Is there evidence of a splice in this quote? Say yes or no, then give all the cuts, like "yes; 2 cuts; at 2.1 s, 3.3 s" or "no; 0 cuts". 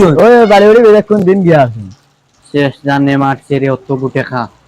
no; 0 cuts